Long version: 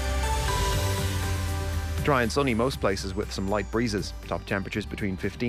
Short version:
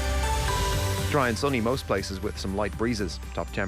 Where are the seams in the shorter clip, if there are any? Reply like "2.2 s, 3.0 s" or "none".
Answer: 1.1 s